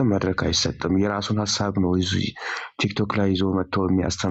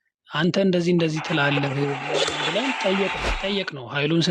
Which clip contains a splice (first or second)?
second